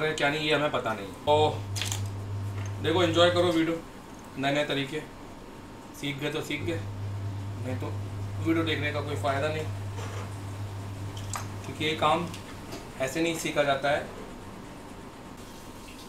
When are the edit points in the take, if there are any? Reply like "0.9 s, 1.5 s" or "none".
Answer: 1.3 s, 15.4 s